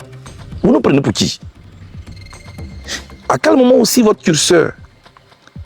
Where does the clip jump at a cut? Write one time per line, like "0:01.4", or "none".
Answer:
0:01.6
0:03.0

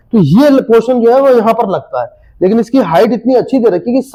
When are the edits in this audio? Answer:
none

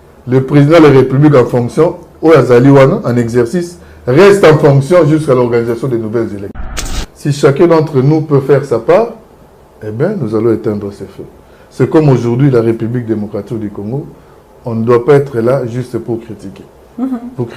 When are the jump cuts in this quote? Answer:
0:06.6

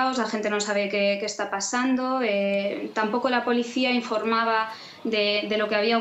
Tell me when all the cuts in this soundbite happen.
none

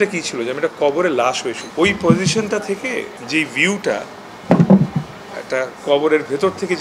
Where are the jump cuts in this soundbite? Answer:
0:01.6
0:03.2
0:05.7

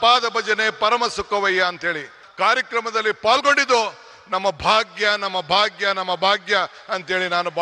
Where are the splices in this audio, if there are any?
0:02.2

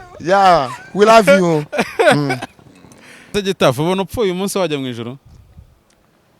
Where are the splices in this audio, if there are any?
0:03.3

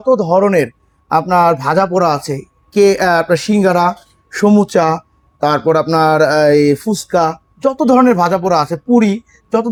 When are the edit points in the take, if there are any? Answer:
none

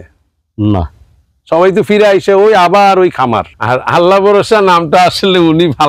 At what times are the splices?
0:03.5

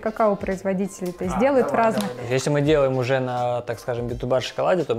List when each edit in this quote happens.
0:02.1

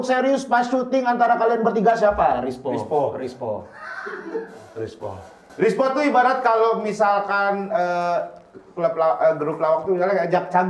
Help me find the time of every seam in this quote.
0:02.3
0:05.4

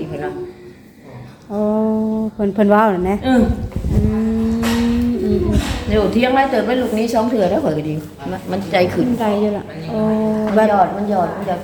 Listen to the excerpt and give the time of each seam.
none

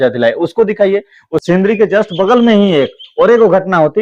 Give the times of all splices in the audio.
0:01.3

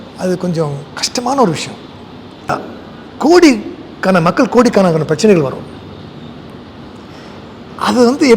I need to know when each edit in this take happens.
0:02.5

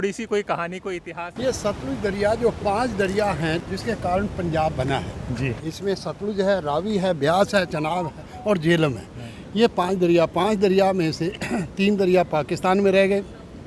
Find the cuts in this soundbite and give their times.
0:01.3
0:03.6
0:05.6

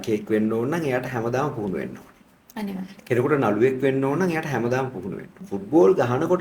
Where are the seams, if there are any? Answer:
0:05.3

